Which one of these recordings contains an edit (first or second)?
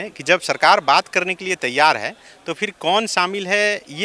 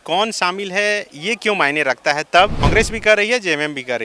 second